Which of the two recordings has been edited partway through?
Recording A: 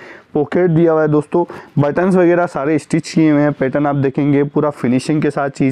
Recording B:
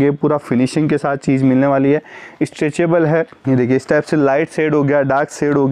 B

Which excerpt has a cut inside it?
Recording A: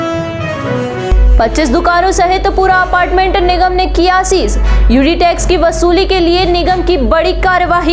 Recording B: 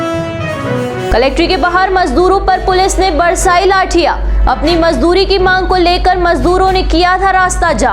A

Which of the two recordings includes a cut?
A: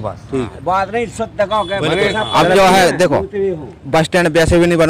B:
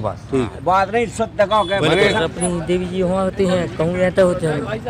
B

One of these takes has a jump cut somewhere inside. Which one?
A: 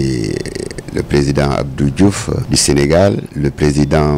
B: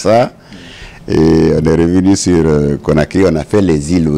A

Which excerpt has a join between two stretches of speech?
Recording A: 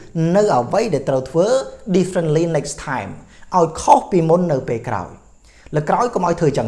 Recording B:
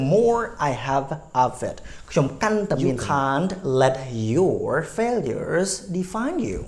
B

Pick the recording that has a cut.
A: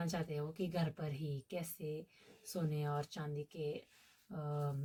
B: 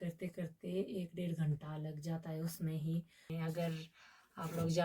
B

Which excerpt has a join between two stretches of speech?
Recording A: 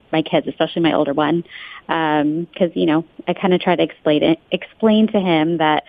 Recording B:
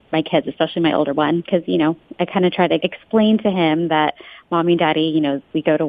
B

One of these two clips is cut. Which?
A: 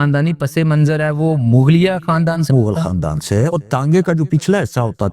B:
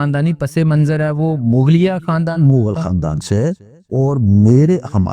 A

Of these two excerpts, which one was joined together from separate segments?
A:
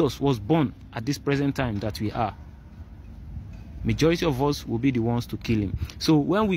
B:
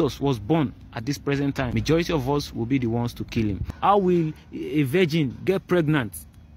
B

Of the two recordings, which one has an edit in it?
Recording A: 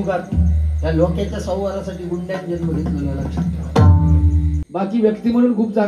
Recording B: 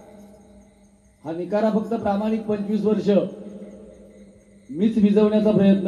A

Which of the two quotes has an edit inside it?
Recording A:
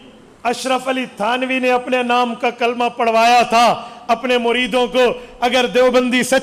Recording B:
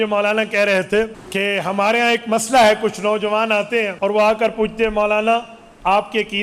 B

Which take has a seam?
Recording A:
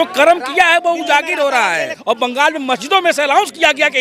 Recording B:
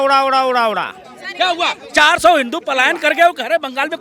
A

